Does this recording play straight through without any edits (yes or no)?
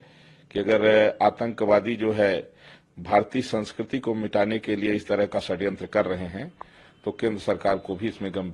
yes